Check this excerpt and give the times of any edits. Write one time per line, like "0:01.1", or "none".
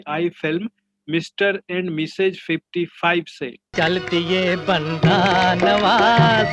none